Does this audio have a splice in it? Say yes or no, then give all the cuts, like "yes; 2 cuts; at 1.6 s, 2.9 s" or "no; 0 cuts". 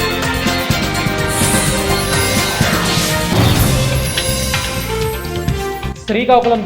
yes; 1 cut; at 5.7 s